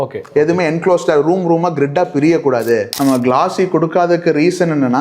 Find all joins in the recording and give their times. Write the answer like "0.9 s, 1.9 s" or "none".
2.9 s